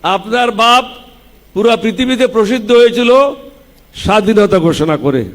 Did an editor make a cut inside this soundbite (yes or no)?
no